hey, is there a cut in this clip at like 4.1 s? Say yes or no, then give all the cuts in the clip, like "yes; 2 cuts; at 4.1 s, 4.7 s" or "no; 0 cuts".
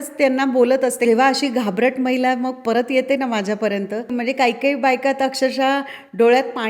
yes; 2 cuts; at 1.1 s, 4.1 s